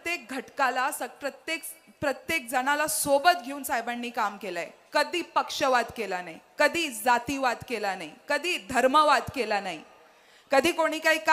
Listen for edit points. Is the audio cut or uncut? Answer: uncut